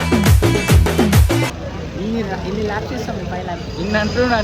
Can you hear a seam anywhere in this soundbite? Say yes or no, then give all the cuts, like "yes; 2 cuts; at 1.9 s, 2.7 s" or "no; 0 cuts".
yes; 1 cut; at 1.6 s